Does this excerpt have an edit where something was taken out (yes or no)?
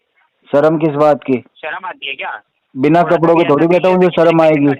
no